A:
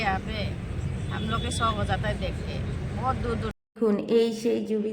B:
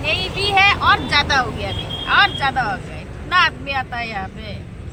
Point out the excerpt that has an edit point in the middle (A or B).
A